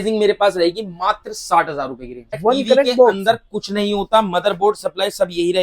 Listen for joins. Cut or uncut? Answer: cut